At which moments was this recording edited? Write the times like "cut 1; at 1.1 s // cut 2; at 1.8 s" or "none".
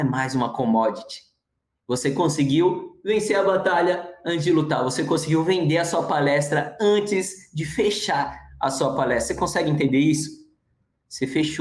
none